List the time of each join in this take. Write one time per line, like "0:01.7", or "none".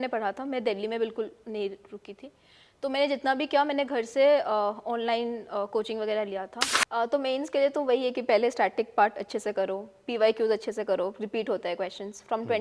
0:06.6